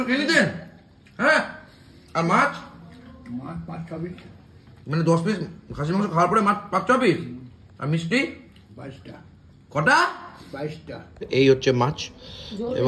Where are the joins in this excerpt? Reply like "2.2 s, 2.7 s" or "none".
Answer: 11.2 s

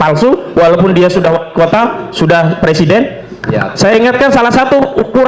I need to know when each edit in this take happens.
3.4 s

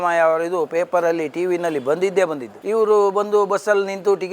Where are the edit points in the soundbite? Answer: 2.5 s

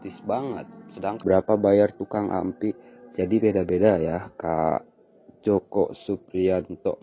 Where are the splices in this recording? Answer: 1.2 s

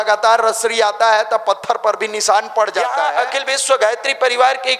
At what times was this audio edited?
3.1 s

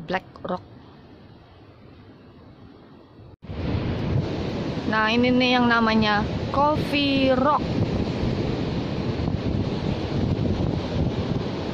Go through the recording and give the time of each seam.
3.5 s

